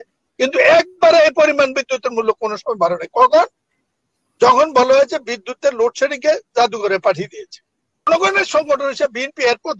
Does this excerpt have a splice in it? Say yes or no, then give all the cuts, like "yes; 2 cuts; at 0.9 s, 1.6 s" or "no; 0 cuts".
yes; 1 cut; at 8.1 s